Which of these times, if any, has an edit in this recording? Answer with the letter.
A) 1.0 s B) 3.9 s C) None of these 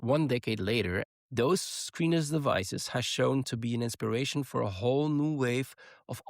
A